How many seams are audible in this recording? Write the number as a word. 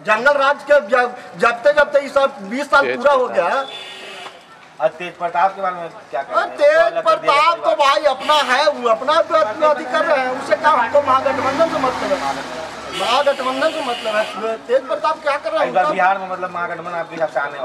zero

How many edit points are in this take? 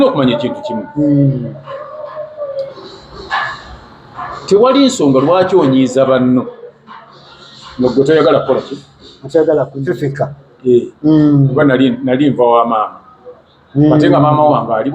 one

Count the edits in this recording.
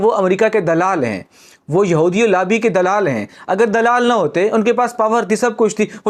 zero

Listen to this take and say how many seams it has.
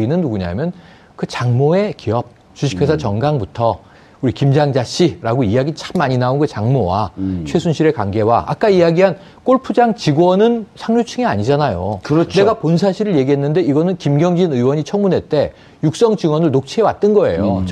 zero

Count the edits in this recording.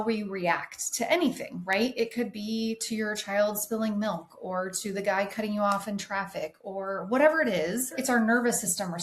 one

